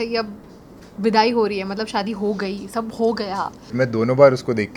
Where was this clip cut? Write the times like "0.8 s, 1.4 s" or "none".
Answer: 3.7 s